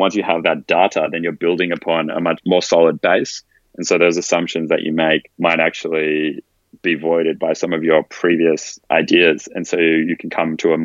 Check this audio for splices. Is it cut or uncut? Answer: cut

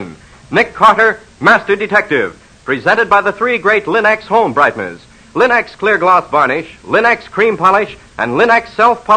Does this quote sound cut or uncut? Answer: uncut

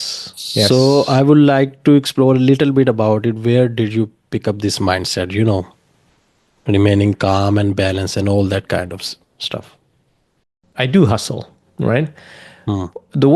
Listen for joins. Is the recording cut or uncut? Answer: cut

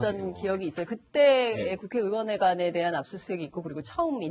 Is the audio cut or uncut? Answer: uncut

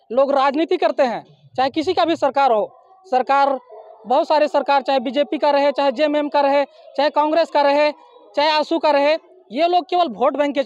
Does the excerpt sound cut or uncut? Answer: uncut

